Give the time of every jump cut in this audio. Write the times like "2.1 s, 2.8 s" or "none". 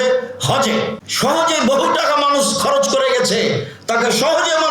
1.0 s